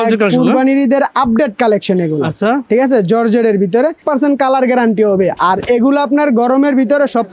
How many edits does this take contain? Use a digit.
1